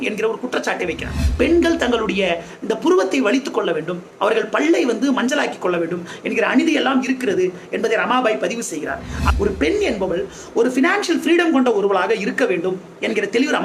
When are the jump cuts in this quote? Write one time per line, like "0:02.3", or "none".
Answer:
0:01.2
0:09.2